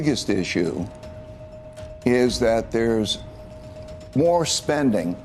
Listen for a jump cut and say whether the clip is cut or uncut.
uncut